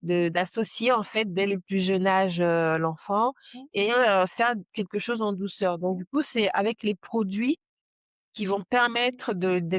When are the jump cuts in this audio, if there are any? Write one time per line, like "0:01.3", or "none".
none